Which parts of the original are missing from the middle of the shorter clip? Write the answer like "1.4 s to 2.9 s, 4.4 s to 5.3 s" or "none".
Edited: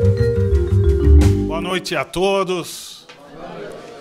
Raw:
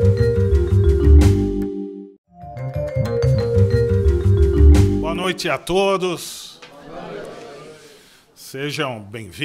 1.4 s to 4.9 s